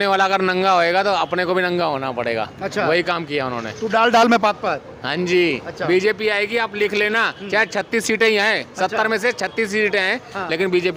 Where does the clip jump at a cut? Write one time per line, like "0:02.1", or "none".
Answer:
none